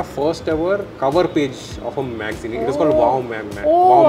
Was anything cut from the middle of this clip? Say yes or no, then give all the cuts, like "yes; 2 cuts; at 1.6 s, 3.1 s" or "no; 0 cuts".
no; 0 cuts